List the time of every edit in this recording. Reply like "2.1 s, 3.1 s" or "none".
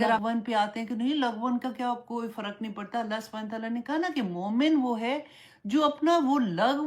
none